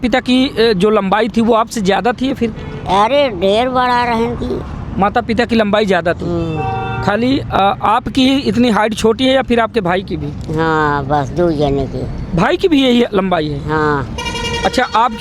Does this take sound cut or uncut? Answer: uncut